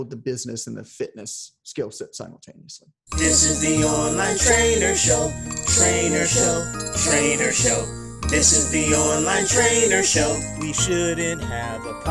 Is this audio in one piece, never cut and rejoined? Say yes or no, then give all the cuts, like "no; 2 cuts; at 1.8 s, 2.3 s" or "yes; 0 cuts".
no; 1 cut; at 3.1 s